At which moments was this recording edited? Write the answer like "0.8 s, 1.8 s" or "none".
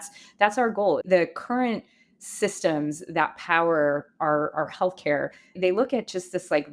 1.0 s, 5.6 s